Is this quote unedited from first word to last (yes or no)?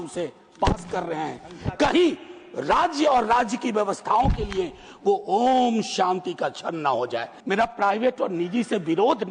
no